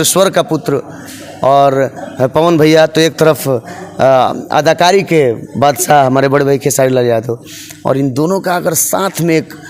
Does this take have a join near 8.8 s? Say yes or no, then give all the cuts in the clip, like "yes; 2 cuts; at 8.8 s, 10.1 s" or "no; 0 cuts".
no; 0 cuts